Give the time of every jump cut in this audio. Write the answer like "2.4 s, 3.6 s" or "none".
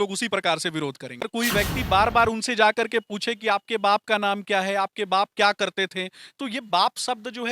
1.3 s

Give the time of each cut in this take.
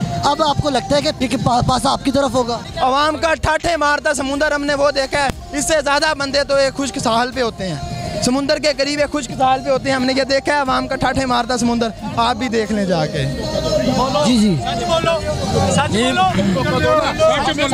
1.1 s, 2.6 s

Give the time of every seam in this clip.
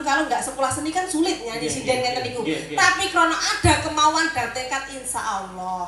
none

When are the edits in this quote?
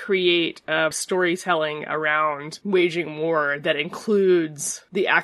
0.9 s

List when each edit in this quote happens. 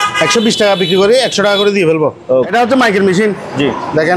2.5 s

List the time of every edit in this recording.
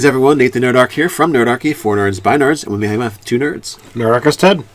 none

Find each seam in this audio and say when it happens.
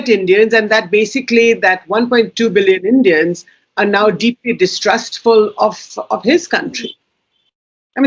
none

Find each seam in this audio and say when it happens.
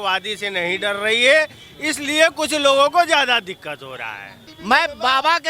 4.5 s

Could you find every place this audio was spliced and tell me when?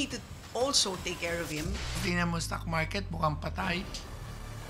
2.0 s

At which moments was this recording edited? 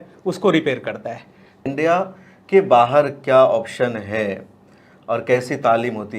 1.6 s

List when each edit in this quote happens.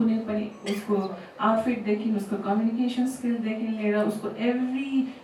none

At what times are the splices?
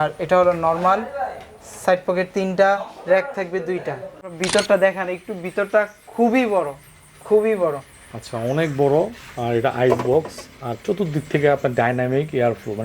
4.4 s

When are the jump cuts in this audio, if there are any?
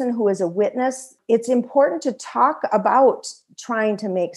1.1 s

